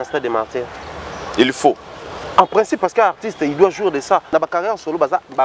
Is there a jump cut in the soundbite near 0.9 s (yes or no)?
no